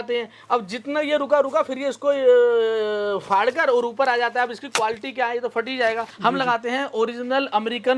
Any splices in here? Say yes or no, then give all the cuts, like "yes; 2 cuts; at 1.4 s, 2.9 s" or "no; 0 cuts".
yes; 1 cut; at 6.1 s